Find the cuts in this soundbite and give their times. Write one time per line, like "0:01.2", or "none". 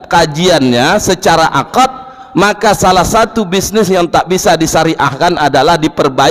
none